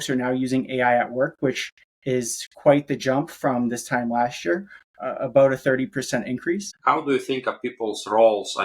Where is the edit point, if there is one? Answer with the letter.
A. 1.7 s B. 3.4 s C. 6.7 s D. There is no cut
C